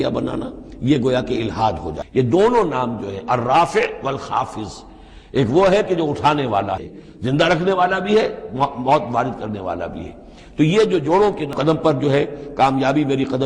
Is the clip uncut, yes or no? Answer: no